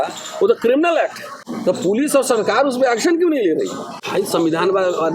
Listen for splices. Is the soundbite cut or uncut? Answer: cut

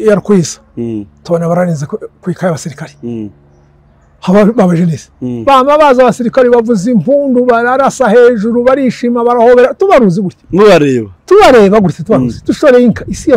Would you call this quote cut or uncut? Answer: uncut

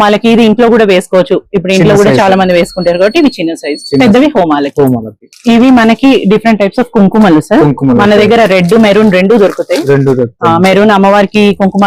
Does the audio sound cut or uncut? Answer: cut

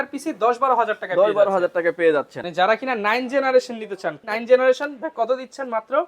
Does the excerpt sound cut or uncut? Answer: cut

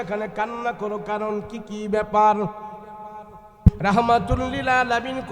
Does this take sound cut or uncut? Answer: cut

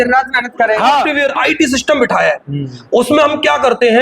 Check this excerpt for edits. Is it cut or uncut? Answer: cut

